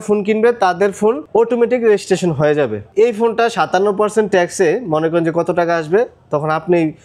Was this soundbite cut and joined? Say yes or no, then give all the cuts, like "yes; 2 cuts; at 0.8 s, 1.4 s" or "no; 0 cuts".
yes; 2 cuts; at 1.2 s, 2.8 s